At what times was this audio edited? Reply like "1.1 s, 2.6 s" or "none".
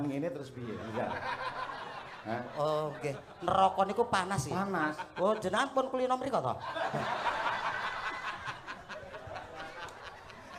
none